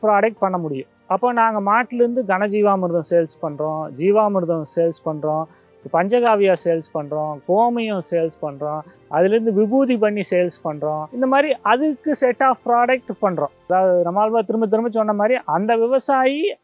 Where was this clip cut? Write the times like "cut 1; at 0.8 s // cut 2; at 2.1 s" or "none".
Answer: cut 1; at 11.0 s // cut 2; at 13.6 s